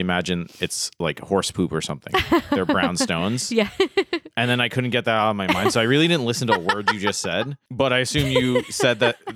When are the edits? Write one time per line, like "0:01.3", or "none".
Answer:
0:07.6